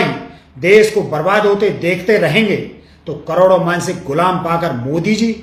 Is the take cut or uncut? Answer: uncut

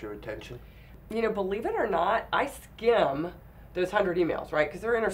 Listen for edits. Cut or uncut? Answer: cut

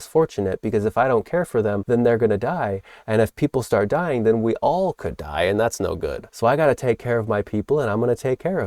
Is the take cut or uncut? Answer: cut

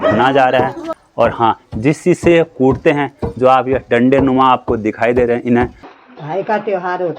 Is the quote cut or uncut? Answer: cut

